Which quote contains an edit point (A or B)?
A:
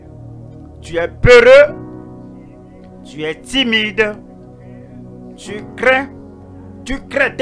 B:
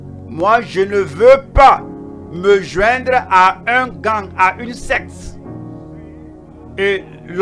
B